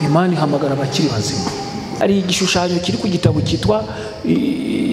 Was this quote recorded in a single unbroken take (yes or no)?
no